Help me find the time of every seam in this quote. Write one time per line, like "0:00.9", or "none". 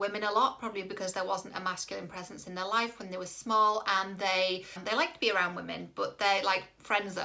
0:04.8